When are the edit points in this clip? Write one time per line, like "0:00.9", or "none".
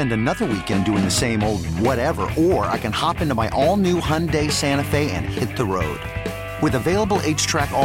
none